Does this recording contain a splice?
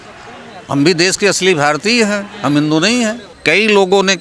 yes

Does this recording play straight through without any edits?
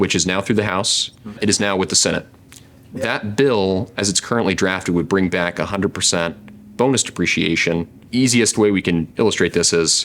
no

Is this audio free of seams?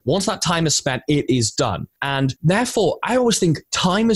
no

